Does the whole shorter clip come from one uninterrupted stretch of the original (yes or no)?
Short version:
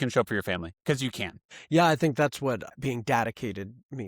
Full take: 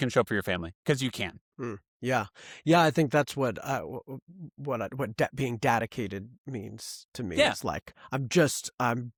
no